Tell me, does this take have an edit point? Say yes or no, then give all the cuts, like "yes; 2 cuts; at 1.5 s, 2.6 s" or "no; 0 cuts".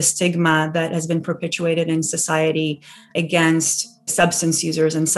yes; 2 cuts; at 3.1 s, 4.1 s